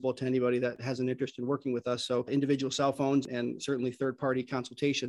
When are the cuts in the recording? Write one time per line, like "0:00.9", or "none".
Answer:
0:00.8
0:03.2